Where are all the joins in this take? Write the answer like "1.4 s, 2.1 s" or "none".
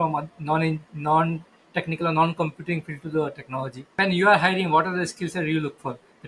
4.0 s